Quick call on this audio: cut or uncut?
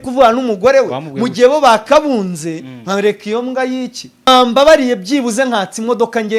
cut